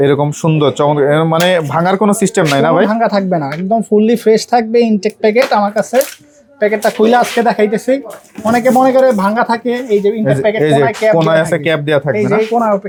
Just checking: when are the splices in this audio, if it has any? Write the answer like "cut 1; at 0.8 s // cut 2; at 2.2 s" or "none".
none